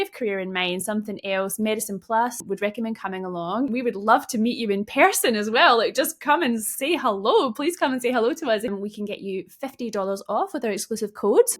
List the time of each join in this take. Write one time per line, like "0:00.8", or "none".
0:02.4
0:03.7
0:08.7

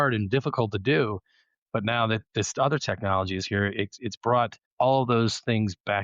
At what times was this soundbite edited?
0:04.6

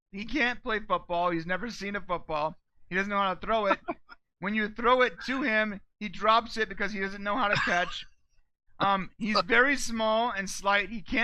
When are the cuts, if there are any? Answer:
none

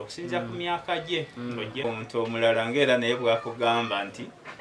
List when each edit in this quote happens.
0:01.8

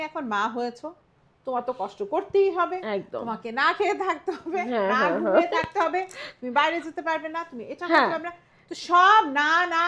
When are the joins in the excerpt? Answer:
none

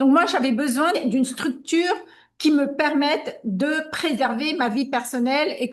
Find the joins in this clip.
0:01.0

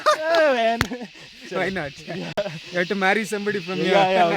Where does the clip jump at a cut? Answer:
none

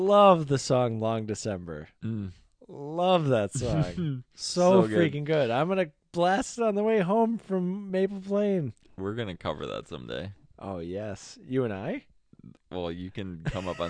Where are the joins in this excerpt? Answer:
none

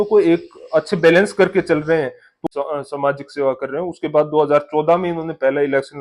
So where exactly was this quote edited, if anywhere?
0:02.4

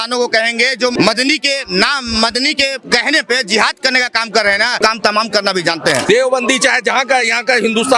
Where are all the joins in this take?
0:00.9
0:04.7
0:06.1

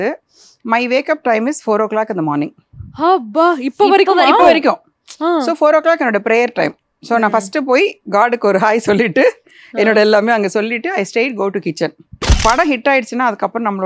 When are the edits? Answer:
0:12.4

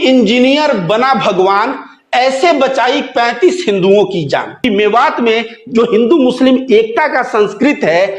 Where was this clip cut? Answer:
0:04.6

